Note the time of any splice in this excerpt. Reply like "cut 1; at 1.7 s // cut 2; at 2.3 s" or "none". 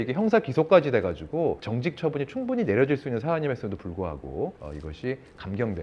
cut 1; at 1.7 s // cut 2; at 4.7 s